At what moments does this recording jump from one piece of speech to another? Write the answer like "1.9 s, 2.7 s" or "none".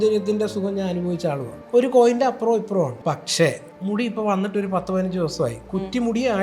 1.5 s, 3.0 s, 3.7 s